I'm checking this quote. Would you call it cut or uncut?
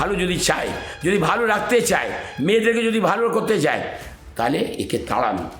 uncut